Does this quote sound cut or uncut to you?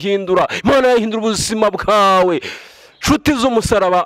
uncut